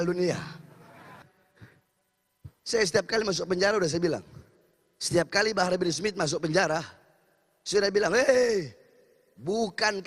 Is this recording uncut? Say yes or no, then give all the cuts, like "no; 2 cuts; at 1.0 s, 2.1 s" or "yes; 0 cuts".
no; 1 cut; at 1.2 s